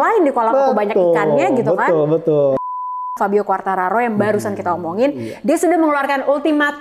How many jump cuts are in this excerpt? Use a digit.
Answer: 1